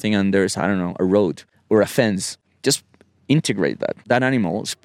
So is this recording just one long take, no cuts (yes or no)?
no